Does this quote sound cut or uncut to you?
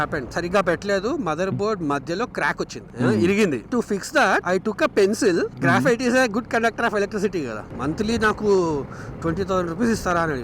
cut